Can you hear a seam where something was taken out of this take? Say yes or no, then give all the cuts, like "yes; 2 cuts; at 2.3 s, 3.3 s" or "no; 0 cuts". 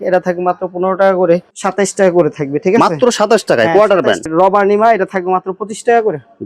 yes; 2 cuts; at 1.5 s, 4.2 s